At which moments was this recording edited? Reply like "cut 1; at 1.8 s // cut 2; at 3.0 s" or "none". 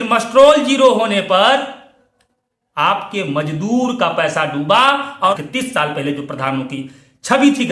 cut 1; at 5.3 s